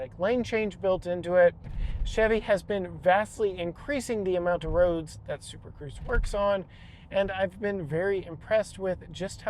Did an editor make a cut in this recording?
yes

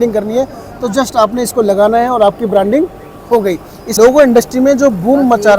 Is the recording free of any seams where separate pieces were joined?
no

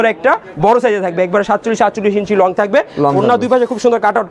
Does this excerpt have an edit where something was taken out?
no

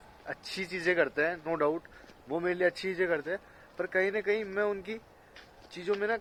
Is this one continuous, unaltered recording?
yes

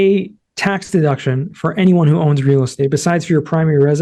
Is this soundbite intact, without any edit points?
yes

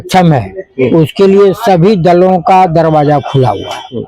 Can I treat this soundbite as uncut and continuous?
yes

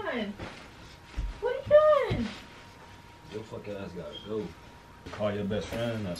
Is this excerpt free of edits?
no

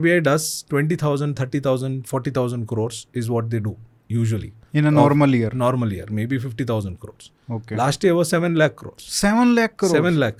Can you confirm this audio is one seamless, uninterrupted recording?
yes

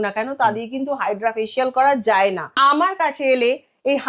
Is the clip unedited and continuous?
no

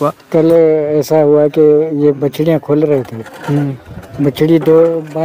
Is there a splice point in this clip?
no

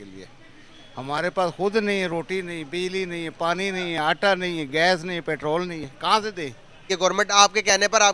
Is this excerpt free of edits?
no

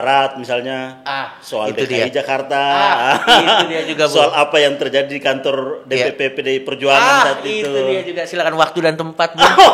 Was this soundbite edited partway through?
no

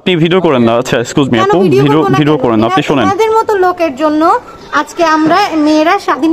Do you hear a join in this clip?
no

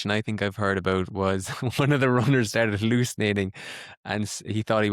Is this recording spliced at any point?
no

